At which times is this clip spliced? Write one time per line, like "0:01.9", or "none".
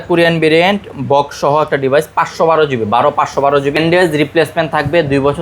0:03.7

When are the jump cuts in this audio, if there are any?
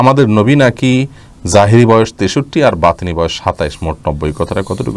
none

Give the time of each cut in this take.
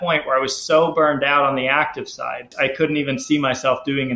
0:02.5

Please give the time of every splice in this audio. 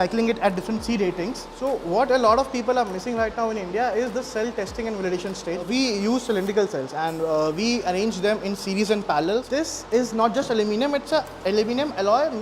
0:01.5
0:05.6
0:09.5

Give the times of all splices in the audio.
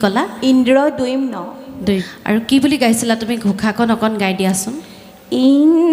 0:02.1

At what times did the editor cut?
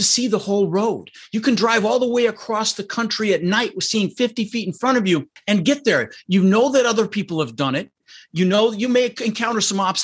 0:05.3

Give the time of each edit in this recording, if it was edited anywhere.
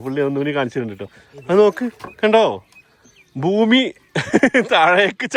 none

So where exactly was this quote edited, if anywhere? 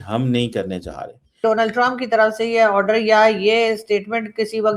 0:01.4

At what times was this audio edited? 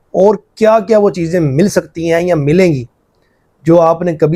none

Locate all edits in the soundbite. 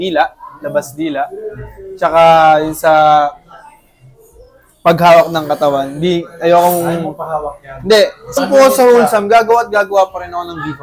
0:08.4

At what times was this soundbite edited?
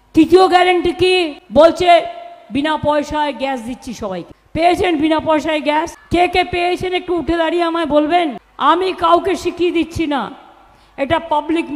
0:01.4
0:04.3
0:06.0
0:08.4

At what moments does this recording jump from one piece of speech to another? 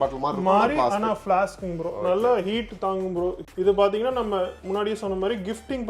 0:03.5

